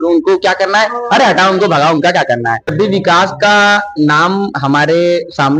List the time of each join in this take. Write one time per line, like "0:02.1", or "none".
0:02.7